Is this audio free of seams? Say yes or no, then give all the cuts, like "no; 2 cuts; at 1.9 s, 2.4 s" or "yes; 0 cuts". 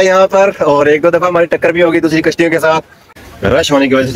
no; 1 cut; at 3.0 s